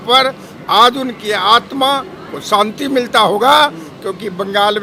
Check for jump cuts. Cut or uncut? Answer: uncut